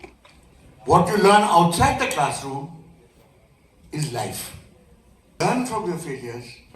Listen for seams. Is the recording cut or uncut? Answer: cut